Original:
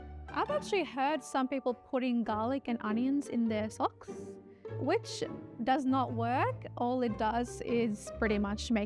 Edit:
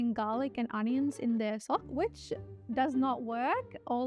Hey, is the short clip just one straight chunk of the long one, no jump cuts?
no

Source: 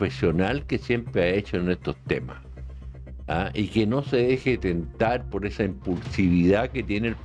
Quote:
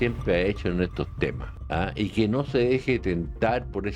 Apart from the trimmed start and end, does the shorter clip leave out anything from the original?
yes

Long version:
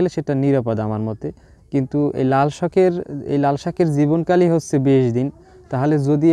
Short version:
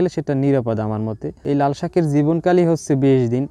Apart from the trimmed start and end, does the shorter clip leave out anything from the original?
yes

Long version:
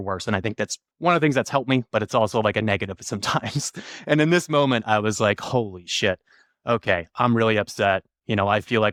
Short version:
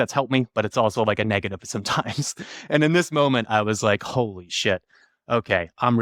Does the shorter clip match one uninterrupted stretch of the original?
yes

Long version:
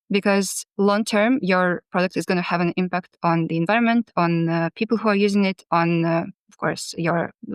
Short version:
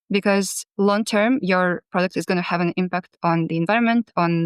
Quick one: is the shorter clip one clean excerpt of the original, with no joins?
yes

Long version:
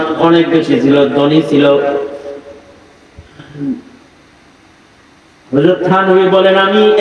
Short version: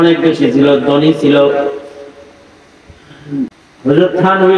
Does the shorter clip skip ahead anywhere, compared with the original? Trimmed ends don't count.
yes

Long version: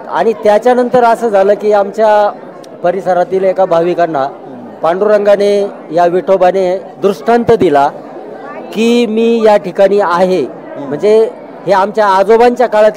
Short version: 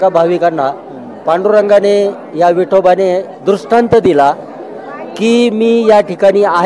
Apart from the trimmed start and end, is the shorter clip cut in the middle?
no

